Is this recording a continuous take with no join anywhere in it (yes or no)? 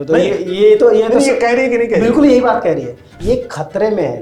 no